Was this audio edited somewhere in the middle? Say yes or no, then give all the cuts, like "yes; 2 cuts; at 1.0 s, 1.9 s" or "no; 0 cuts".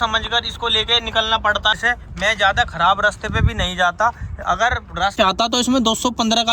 yes; 2 cuts; at 1.7 s, 5.1 s